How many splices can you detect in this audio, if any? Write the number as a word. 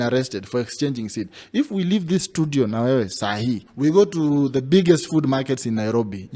one